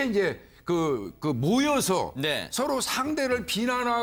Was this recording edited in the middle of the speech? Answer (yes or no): no